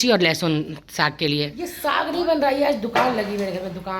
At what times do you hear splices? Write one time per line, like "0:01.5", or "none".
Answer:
0:01.8